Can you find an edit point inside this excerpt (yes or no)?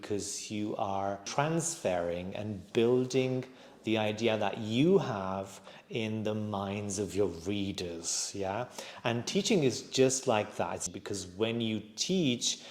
yes